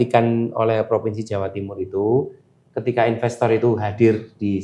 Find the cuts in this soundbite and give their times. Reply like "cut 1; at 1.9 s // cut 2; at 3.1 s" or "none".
none